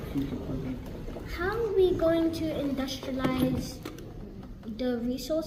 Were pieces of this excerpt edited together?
no; 0 cuts

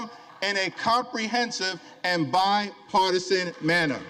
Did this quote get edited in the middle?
no; 0 cuts

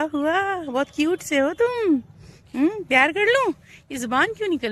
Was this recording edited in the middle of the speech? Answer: no; 0 cuts

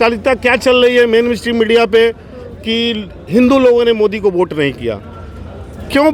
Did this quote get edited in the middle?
no; 0 cuts

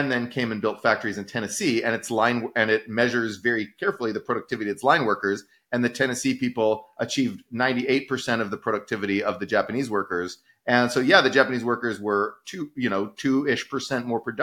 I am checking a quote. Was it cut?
no; 0 cuts

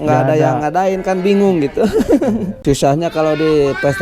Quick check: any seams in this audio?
yes; 1 cut; at 2.5 s

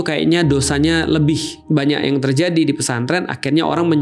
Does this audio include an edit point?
yes; 1 cut; at 1.6 s

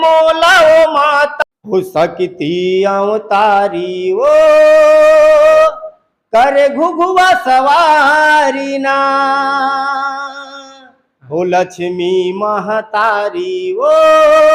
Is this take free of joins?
no; 1 cut; at 1.3 s

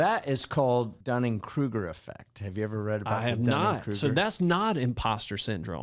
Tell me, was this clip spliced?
yes; 1 cut; at 1.0 s

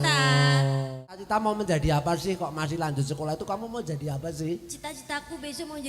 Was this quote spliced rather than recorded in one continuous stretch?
yes; 1 cut; at 1.1 s

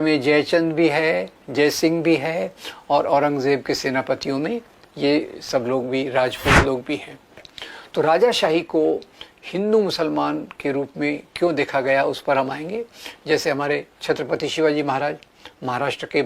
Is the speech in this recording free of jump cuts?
no; 1 cut; at 7.6 s

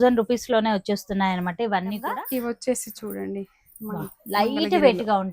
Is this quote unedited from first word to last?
no; 1 cut; at 2.1 s

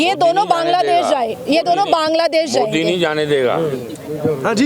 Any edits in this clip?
no; 0 cuts

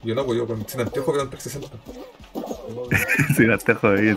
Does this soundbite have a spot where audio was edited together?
no; 0 cuts

